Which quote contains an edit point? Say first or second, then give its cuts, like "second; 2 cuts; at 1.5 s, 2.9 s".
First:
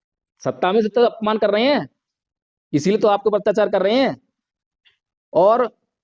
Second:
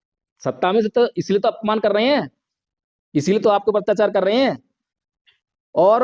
first; 1 cut; at 1.1 s